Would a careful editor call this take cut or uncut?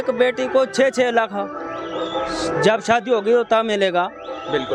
uncut